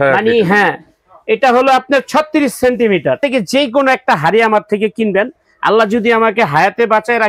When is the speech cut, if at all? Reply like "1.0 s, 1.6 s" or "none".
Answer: 3.2 s

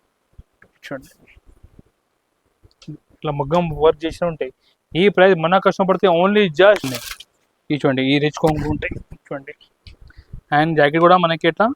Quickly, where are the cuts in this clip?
6.9 s

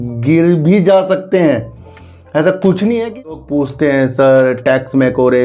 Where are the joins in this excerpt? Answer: 3.3 s

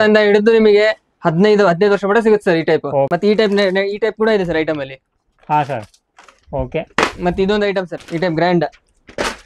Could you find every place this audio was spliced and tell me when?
3.1 s, 8.0 s

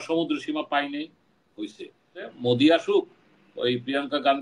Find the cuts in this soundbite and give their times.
2.3 s

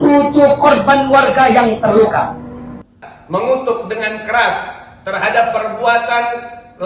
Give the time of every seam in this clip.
2.8 s

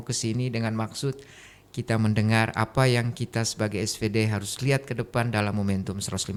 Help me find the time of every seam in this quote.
none

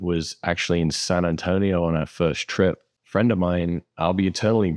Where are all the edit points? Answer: 2.9 s

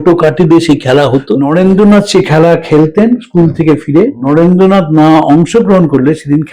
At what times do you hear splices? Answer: 1.6 s, 3.9 s

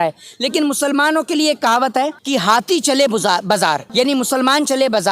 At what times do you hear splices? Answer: 2.2 s, 3.8 s

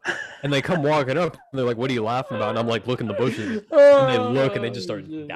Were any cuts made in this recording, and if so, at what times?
none

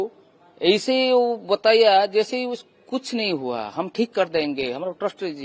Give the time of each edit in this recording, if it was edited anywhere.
none

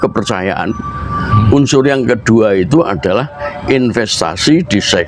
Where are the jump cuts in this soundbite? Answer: none

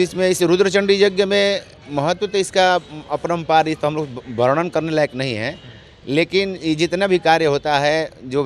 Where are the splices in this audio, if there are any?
none

